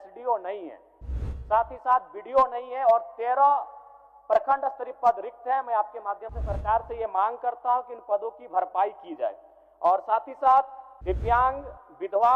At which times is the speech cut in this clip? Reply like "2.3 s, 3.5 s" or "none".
10.9 s